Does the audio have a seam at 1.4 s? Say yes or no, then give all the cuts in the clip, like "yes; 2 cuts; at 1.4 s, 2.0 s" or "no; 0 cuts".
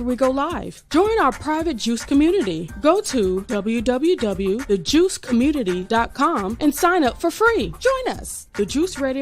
no; 1 cut; at 7.9 s